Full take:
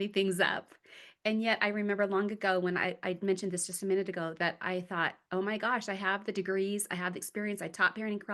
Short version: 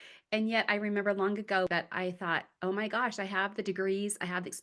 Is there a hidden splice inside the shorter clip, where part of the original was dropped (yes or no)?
yes